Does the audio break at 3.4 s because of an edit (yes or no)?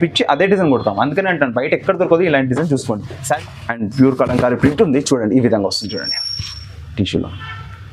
yes